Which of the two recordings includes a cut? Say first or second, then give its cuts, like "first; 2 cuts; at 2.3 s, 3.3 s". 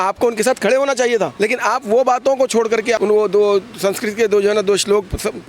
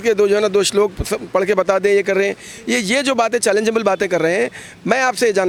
first; 2 cuts; at 1.3 s, 3.0 s